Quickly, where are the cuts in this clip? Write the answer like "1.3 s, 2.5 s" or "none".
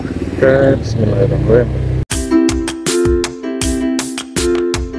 2.1 s